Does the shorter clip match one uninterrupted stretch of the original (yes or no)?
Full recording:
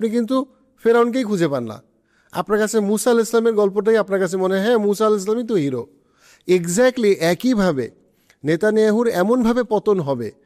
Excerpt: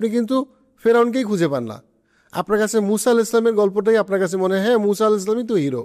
yes